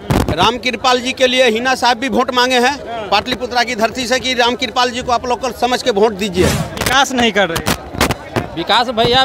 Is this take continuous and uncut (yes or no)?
no